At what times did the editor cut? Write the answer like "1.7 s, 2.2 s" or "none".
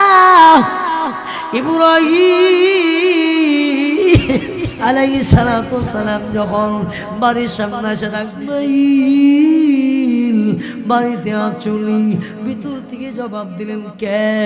8.4 s